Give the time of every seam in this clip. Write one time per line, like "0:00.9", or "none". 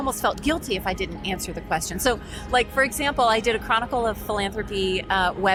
none